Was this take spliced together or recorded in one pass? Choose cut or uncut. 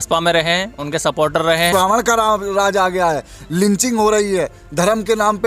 cut